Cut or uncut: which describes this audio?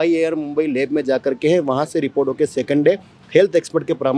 uncut